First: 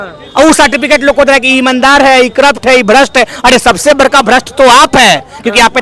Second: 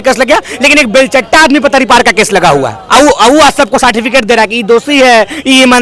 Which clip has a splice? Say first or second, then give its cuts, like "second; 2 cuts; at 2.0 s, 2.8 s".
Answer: second; 1 cut; at 2.8 s